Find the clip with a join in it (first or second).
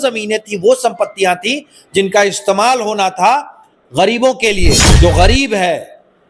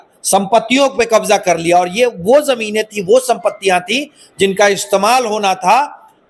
first